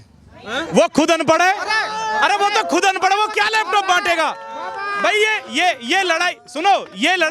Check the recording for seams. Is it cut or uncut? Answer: uncut